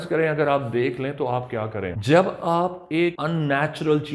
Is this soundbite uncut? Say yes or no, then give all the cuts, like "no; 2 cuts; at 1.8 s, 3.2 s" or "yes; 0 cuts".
no; 2 cuts; at 1.9 s, 3.2 s